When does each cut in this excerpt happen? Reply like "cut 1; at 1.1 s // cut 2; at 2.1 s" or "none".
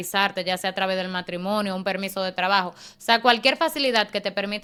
none